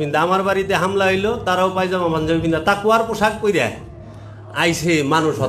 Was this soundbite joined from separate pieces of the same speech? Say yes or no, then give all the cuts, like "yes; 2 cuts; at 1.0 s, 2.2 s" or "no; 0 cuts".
no; 0 cuts